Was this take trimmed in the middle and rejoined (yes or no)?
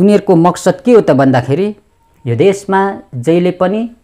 no